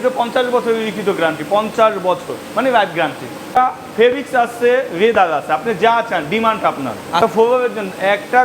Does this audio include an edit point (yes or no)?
yes